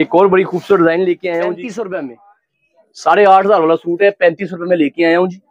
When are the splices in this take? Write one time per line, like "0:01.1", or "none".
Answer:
0:01.6